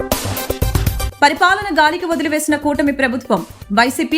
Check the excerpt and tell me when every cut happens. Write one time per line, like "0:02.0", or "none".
0:01.1

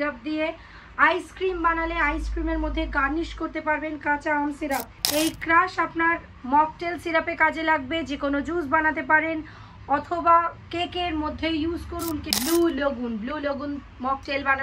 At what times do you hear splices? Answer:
0:05.0
0:12.3

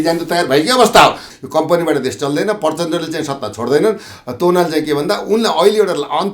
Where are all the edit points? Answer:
0:01.3

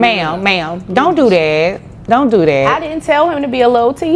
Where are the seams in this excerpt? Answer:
none

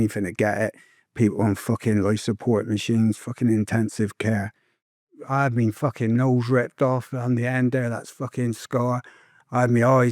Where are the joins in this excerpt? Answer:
0:05.1

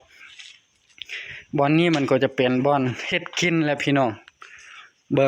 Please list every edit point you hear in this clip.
none

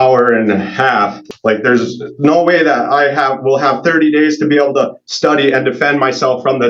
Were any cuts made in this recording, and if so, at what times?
0:01.2

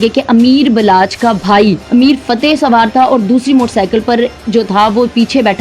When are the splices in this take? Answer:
0:01.8

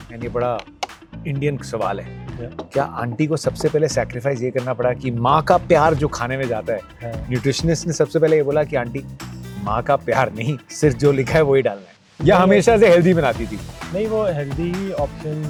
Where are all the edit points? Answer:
none

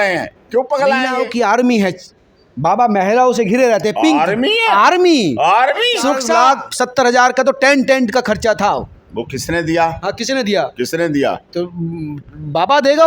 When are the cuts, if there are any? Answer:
0:01.1
0:06.3

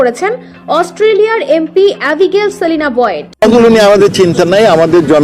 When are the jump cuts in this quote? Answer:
0:03.2

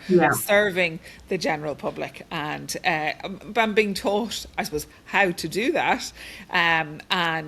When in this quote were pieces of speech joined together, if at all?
none

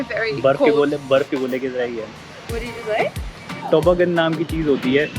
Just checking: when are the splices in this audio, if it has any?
0:03.6

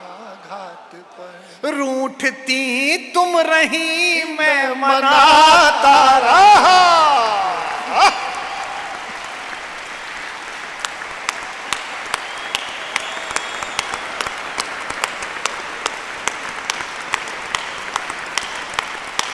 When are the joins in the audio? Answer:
none

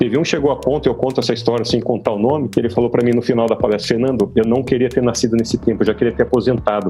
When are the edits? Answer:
0:02.7

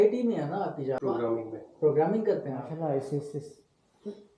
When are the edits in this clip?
0:01.0
0:02.7

